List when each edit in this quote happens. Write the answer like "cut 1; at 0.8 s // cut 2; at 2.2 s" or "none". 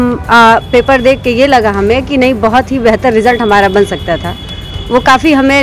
none